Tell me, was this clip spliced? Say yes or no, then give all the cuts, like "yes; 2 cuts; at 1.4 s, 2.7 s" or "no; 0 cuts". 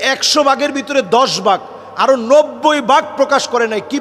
no; 0 cuts